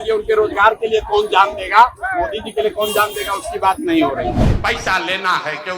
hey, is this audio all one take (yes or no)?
no